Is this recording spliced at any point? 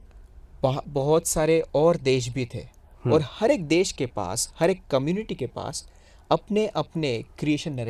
no; 0 cuts

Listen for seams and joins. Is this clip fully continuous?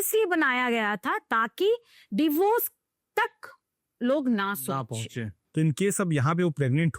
no; 1 cut; at 5.4 s

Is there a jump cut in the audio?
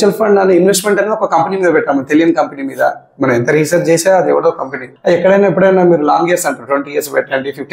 no; 0 cuts

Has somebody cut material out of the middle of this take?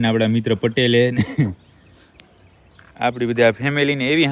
no; 0 cuts

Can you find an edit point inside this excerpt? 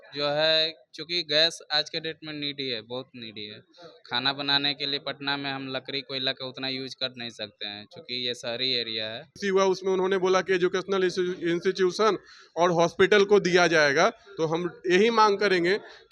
yes; 1 cut; at 9.3 s

